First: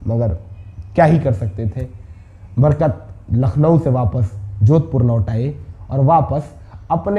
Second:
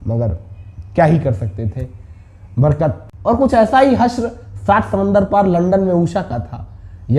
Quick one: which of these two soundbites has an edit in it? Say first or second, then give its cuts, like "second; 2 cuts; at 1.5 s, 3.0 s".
second; 1 cut; at 3.1 s